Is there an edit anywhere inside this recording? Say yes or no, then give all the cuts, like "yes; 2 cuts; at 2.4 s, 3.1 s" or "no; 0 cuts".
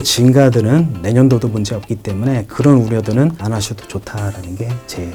no; 0 cuts